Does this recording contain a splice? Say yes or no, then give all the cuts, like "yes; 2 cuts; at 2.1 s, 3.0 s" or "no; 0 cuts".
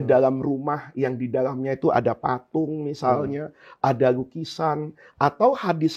no; 0 cuts